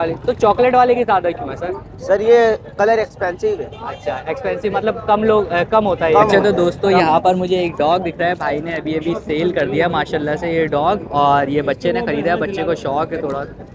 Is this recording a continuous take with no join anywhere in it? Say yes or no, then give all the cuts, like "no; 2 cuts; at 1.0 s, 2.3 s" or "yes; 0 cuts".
no; 1 cut; at 6.3 s